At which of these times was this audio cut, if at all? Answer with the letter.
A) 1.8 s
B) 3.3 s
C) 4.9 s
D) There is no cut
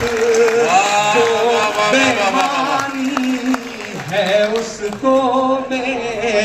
D